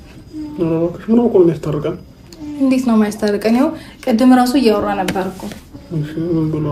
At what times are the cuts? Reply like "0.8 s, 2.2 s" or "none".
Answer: none